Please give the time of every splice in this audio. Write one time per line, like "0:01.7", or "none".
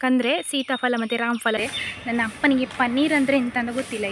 0:01.6